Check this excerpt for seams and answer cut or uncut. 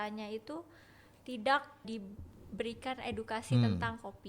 cut